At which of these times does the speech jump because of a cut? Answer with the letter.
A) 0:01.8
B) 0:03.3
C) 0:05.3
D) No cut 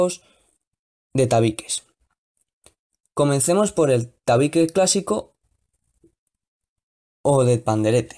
D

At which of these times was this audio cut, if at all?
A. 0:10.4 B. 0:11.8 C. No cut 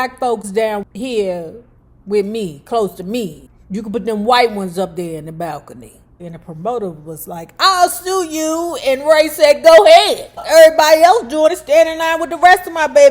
A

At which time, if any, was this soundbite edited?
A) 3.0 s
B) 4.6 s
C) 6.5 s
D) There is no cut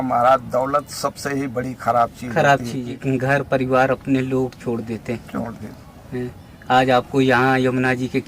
A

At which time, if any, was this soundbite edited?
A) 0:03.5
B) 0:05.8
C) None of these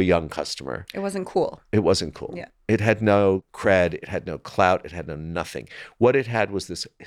A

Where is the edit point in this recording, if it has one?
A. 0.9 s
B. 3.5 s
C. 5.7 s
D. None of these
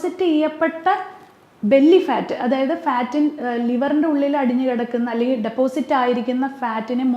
D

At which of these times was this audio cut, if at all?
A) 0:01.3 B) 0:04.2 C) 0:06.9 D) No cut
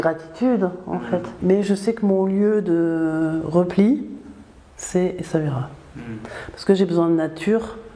A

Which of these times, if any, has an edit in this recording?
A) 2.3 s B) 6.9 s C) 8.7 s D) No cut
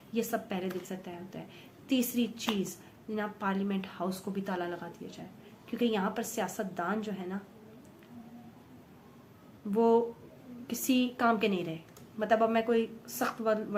D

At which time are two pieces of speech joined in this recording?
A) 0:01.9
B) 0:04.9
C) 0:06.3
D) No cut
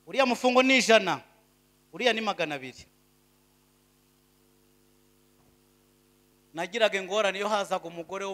C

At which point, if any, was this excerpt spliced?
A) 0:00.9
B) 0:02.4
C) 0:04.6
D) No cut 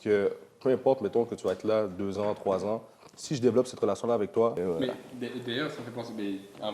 C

